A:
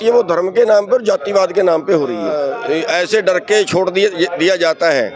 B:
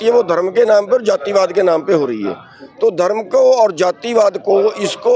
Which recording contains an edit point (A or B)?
A